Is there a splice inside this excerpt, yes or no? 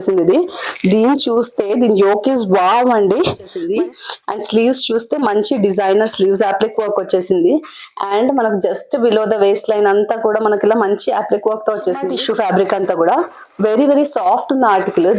yes